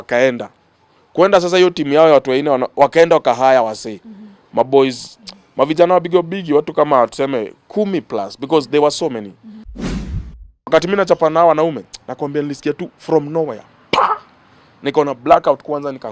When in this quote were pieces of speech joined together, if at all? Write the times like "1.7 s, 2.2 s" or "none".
10.1 s